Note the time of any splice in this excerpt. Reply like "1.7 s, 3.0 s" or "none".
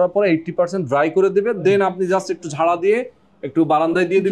none